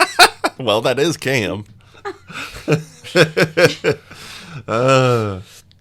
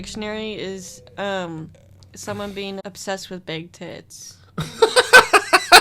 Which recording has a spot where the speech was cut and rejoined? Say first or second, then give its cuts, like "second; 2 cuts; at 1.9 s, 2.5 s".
second; 1 cut; at 2.8 s